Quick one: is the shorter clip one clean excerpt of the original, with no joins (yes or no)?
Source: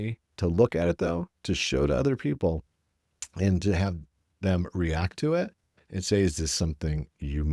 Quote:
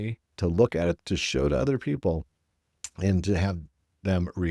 no